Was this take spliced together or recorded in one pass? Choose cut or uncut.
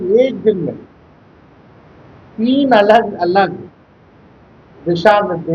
uncut